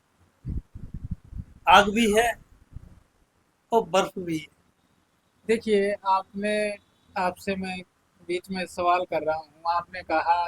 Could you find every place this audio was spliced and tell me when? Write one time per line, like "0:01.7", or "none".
none